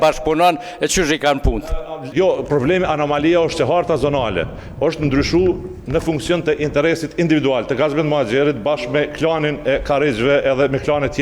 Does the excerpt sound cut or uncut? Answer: cut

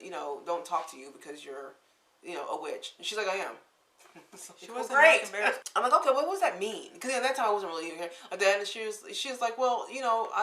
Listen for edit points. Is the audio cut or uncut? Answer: uncut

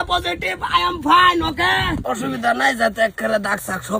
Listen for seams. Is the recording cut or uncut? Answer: cut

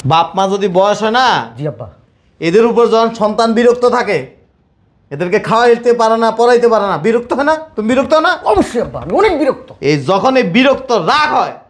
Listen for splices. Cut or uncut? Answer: uncut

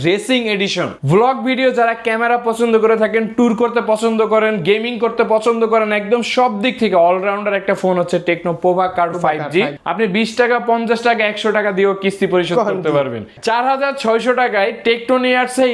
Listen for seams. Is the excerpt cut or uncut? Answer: cut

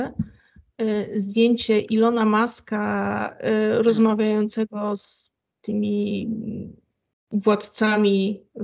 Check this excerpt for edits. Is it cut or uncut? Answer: uncut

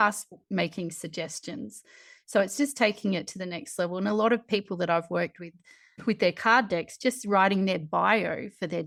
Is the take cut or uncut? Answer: uncut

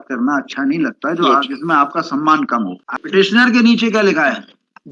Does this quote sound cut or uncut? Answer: cut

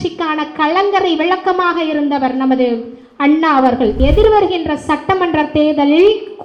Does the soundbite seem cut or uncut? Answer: cut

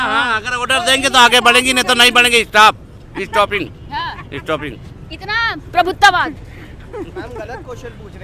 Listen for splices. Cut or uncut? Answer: uncut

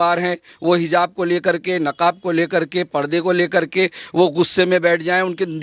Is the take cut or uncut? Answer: uncut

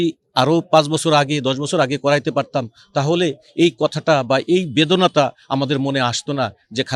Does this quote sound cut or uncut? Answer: uncut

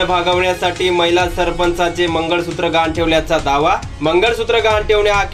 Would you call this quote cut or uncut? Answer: uncut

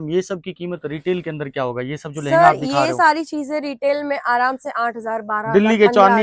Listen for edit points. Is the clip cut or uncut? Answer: uncut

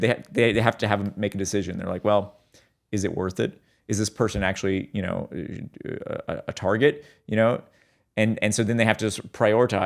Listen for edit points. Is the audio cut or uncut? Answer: uncut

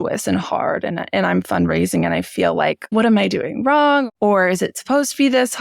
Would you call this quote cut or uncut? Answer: cut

